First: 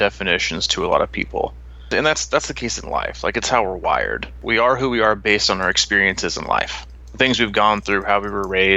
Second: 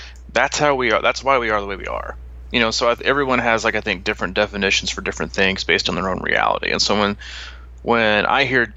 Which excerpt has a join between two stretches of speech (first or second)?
first